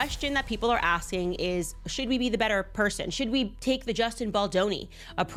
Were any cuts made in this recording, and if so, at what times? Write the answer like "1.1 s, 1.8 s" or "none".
none